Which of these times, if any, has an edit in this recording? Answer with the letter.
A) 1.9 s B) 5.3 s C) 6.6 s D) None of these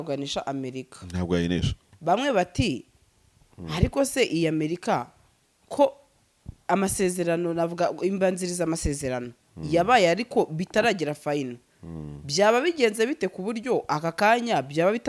A